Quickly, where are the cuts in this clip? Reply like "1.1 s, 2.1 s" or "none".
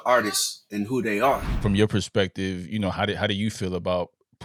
1.5 s